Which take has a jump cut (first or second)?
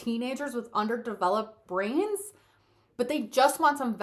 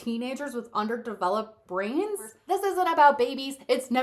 second